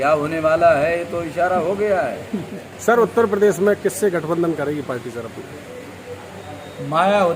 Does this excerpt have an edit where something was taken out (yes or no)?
yes